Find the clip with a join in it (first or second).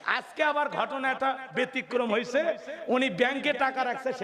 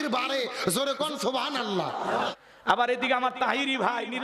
second